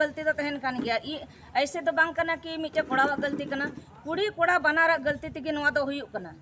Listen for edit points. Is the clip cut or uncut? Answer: uncut